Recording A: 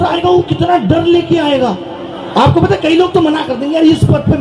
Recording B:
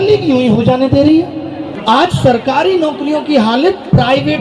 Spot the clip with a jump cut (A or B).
B